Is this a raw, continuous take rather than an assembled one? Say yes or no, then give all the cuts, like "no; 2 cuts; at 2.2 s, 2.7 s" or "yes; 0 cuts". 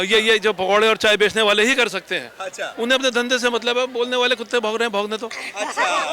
no; 1 cut; at 2.7 s